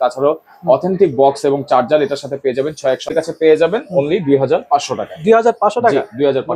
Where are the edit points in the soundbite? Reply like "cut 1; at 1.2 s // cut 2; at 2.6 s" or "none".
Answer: cut 1; at 3.1 s

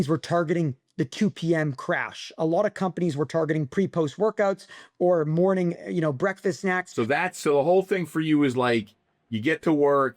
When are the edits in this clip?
cut 1; at 6.9 s

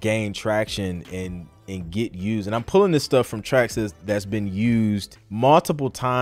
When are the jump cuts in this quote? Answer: cut 1; at 5.2 s

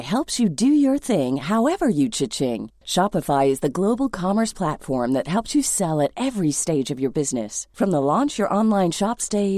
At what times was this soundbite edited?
none

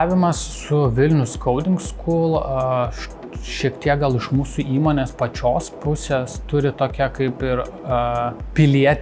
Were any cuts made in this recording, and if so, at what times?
none

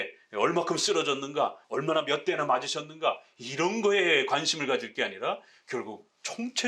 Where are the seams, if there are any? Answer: cut 1; at 1.6 s

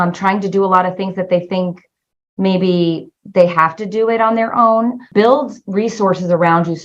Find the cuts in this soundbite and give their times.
cut 1; at 5.0 s

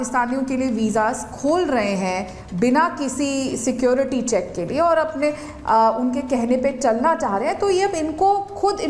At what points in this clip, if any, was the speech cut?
none

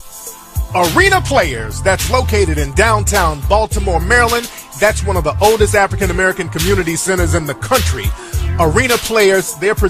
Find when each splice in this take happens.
none

